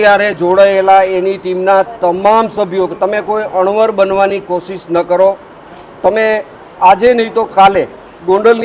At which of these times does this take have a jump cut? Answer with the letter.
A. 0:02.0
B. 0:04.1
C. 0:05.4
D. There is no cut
D